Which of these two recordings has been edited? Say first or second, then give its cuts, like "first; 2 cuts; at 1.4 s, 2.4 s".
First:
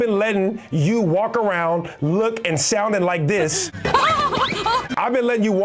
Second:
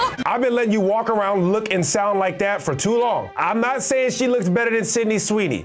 second; 1 cut; at 3.3 s